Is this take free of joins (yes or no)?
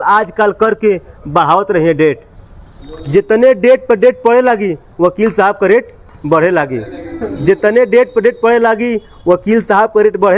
yes